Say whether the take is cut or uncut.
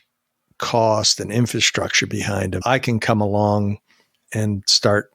cut